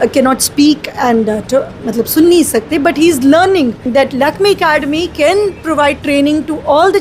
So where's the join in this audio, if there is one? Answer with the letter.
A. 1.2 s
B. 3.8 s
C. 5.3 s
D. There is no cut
B